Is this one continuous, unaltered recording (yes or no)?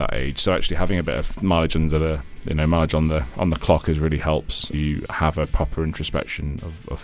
no